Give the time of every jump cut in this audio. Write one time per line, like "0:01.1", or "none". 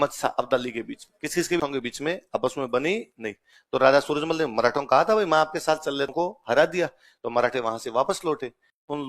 0:01.6
0:06.1